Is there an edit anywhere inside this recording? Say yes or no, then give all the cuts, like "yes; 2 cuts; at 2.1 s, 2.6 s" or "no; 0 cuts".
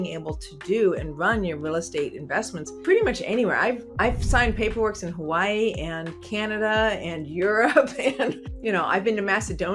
yes; 3 cuts; at 2.6 s, 3.9 s, 8.5 s